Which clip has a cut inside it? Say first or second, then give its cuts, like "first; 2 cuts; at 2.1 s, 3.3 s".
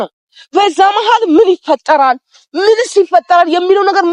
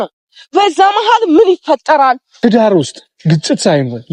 second; 1 cut; at 2.3 s